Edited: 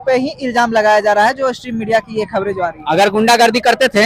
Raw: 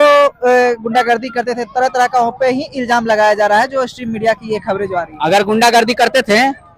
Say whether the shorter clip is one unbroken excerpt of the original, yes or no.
yes